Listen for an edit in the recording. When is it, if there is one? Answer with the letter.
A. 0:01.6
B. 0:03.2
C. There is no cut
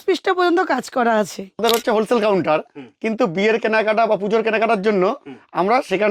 A